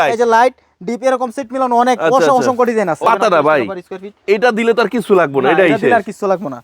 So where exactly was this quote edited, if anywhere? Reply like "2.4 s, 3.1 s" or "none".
3.0 s